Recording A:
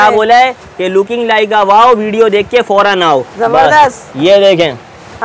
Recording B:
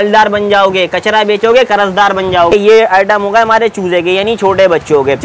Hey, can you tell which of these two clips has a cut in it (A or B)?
B